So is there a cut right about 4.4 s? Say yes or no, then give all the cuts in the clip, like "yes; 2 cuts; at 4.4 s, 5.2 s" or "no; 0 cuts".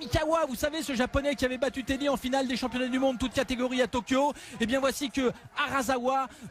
yes; 1 cut; at 4.4 s